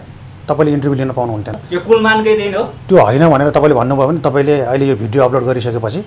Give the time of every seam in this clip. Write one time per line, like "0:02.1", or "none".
0:01.6